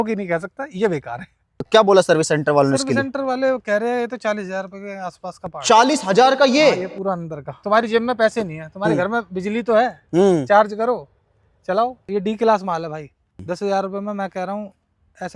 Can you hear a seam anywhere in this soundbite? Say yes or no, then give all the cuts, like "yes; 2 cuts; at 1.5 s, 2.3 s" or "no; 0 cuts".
yes; 4 cuts; at 1.7 s, 7.5 s, 12.0 s, 13.4 s